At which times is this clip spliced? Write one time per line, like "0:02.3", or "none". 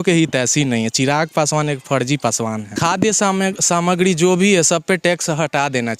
0:02.7